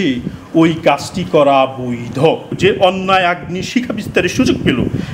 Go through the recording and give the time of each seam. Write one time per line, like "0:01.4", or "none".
0:02.6